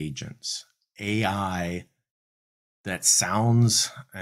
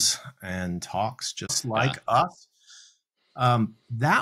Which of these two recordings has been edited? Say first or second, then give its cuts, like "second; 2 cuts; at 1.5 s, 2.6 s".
second; 1 cut; at 1.6 s